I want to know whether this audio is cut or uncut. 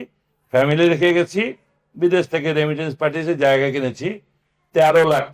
uncut